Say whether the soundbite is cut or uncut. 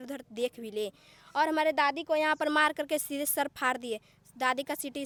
uncut